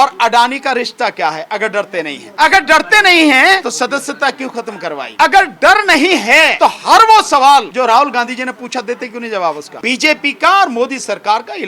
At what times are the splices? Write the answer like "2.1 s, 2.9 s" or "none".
2.2 s, 3.6 s, 5.1 s, 6.5 s, 7.7 s, 9.7 s

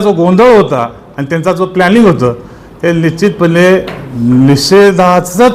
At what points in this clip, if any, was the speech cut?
none

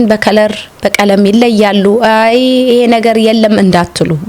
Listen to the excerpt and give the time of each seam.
none

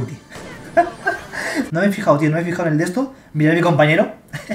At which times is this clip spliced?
1.7 s

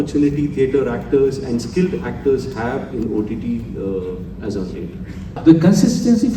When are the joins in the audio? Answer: 5.4 s

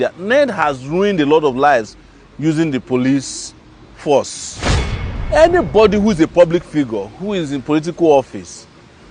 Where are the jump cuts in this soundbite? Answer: 5.0 s

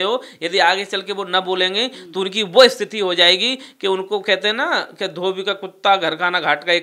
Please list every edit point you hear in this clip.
none

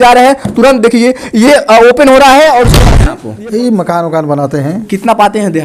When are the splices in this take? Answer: 2.8 s

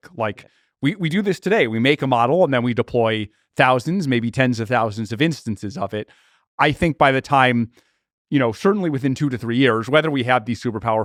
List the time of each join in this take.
none

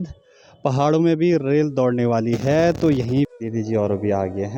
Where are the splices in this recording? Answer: 3.3 s

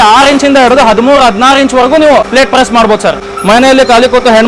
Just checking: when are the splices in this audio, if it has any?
2.3 s, 3.3 s

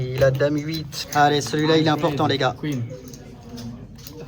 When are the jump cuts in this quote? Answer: 0.9 s

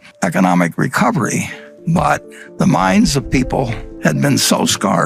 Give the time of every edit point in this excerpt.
none

